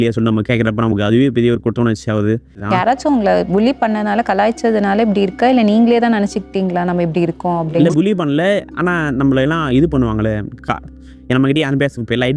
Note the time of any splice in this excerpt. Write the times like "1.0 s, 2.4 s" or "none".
2.6 s